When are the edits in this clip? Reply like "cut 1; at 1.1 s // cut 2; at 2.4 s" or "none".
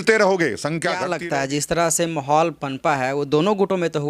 cut 1; at 1.0 s